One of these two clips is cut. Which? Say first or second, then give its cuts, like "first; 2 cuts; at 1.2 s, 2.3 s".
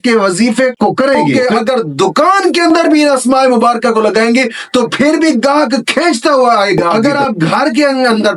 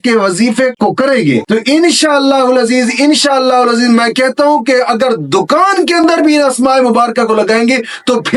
first; 2 cuts; at 1.4 s, 6.9 s